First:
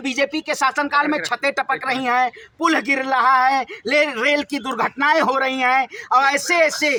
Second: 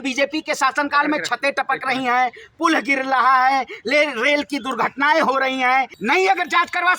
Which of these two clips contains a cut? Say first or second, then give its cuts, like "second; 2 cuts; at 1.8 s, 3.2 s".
second; 1 cut; at 5.9 s